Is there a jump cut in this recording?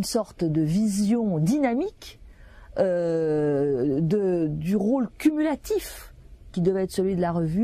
yes; 1 cut; at 2.5 s

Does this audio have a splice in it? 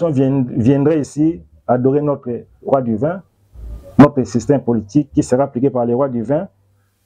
no; 0 cuts

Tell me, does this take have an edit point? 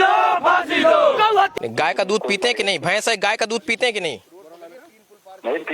yes; 1 cut; at 1.6 s

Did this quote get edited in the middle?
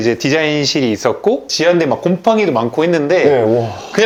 no; 0 cuts

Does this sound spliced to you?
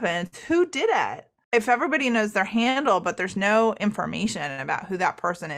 yes; 1 cut; at 1.4 s

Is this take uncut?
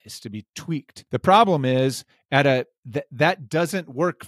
no; 1 cut; at 1.0 s

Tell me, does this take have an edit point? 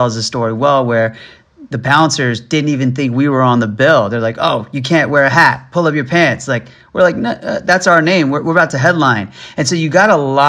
no; 0 cuts

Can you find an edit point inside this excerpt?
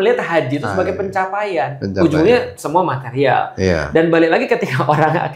no; 0 cuts

